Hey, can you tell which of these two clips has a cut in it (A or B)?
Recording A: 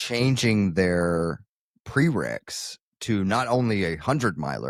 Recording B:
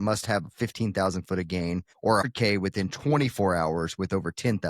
B